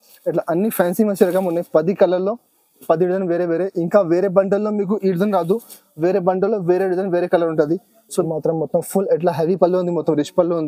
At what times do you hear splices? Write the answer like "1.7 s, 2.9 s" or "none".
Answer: 8.2 s

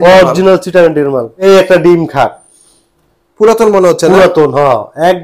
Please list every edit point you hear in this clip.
1.3 s

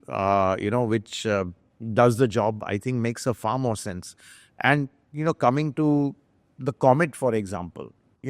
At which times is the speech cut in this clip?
none

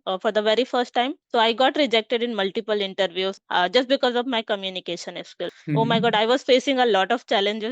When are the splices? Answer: 1.2 s, 3.4 s, 5.6 s

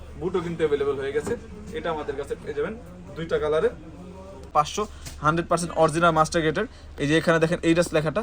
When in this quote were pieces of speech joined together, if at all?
4.5 s

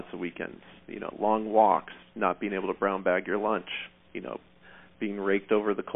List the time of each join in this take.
none

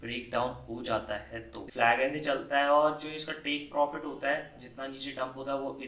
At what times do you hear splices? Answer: 1.6 s

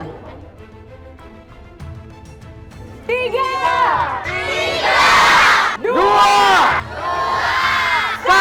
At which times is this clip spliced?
none

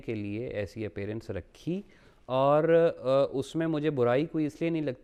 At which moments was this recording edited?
none

